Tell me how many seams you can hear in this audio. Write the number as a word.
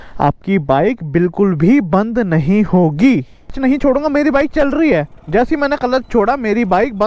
one